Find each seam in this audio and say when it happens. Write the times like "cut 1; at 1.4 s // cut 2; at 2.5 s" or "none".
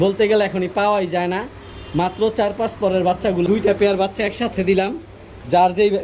cut 1; at 3.5 s